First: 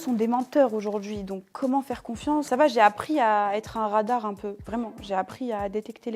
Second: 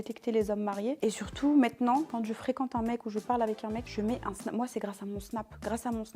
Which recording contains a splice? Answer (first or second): first